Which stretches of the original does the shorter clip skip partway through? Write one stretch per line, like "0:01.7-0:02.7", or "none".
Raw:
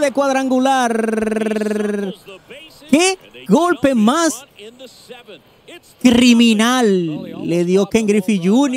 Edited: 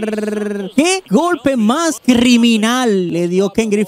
0:02.3-0:03.3
0:04.4-0:06.0
0:07.1-0:07.5

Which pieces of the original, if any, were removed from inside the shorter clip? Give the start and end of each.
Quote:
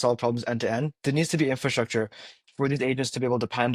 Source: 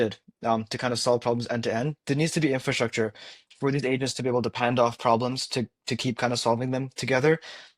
none

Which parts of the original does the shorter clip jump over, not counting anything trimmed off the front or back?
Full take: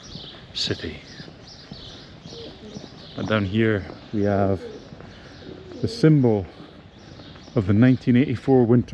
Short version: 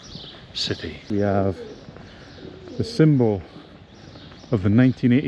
0:00.9-0:04.0

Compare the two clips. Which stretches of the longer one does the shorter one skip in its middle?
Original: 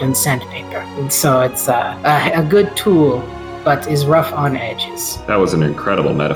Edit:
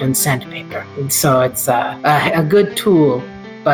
none

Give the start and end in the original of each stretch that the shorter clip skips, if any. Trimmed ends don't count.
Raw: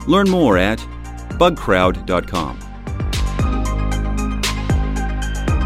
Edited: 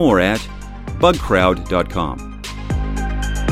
0:02.8-0:04.4

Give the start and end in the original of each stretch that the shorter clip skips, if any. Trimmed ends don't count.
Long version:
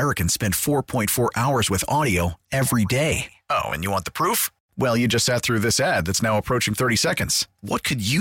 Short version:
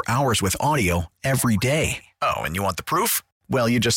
none

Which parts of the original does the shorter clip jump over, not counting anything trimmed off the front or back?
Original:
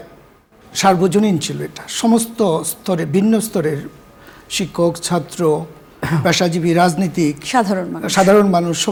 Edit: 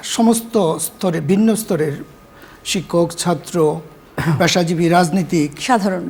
none

